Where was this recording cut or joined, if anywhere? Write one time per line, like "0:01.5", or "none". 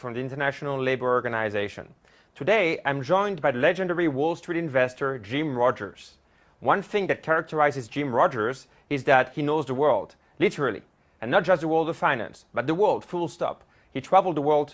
0:09.4